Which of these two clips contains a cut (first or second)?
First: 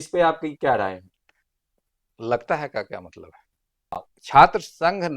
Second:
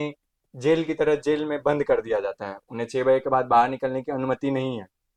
first